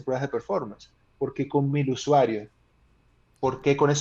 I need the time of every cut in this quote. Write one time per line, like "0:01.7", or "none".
none

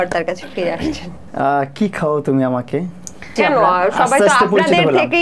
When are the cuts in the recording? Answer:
0:01.1
0:03.3

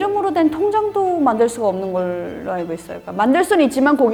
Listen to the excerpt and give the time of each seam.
none

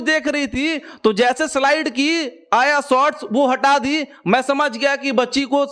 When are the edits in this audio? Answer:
none

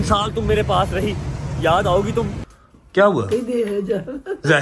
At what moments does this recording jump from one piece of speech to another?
0:02.5

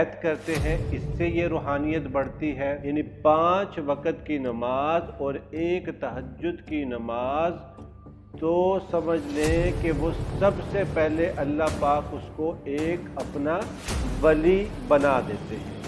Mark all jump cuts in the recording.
0:02.8

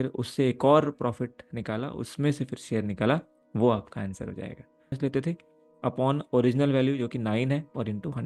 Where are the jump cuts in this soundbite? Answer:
0:05.0

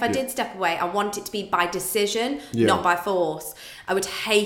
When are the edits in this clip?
none

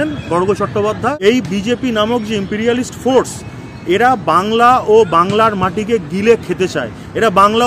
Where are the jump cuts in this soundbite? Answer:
0:01.1

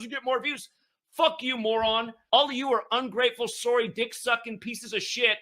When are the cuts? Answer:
0:02.2

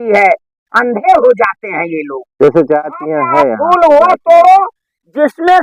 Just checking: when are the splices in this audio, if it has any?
0:03.5

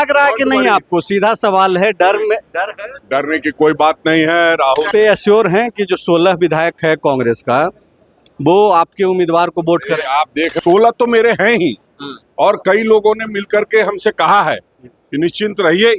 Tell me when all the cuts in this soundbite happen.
0:04.9
0:10.5

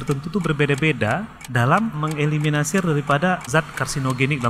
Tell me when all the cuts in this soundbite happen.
0:02.0
0:03.4

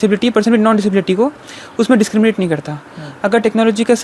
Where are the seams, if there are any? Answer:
none

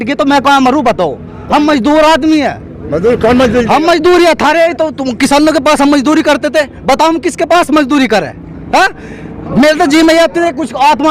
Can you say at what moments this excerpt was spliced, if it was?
none

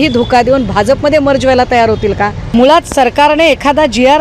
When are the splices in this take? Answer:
0:02.4

